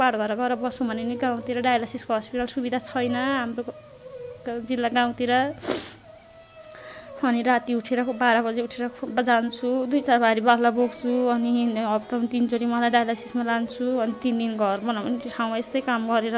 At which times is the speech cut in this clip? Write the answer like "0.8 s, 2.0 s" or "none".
none